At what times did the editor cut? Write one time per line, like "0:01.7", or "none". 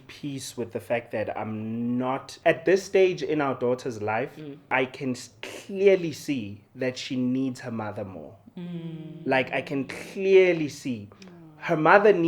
0:02.3
0:04.7

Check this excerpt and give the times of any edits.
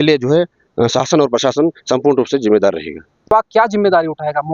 0:03.2

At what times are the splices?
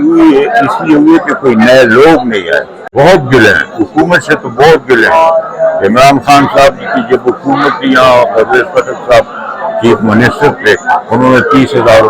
0:02.8

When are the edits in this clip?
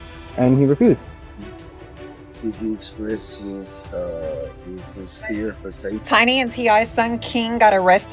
0:06.0

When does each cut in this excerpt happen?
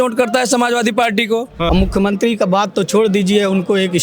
0:01.6

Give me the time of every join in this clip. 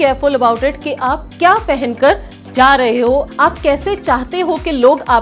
none

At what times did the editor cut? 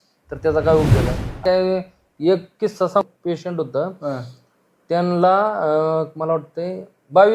0:01.4

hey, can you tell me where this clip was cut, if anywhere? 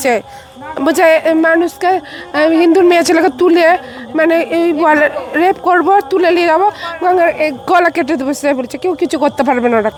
none

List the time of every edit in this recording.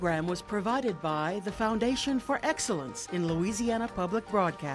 none

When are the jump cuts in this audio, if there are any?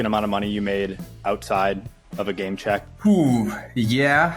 0:02.9

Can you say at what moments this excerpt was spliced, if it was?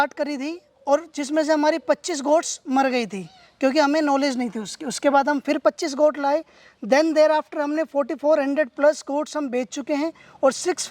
none

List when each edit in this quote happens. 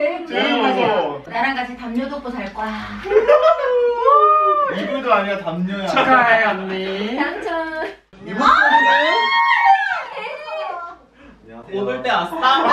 none

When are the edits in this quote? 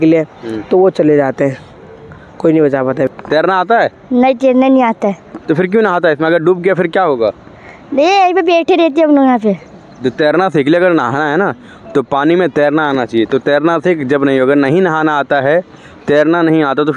0:03.1

